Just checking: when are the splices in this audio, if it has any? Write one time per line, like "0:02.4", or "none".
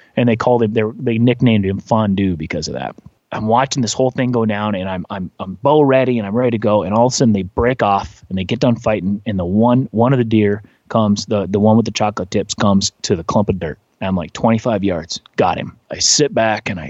0:03.2
0:13.0
0:15.9